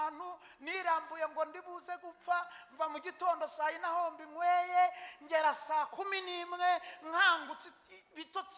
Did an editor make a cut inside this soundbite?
no; 0 cuts

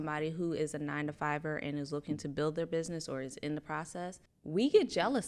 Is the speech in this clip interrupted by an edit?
yes; 1 cut; at 4.3 s

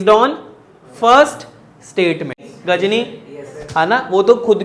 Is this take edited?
yes; 1 cut; at 2.5 s

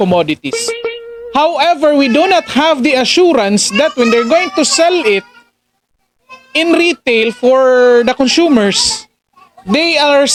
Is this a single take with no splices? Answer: yes; 0 cuts

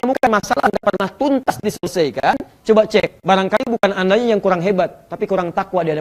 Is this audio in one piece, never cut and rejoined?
yes; 0 cuts

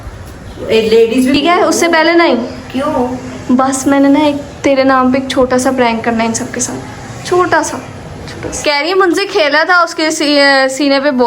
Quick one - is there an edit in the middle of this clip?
yes; 2 cuts; at 1.3 s, 8.5 s

